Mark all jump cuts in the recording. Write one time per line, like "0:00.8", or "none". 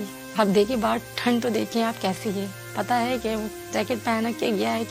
none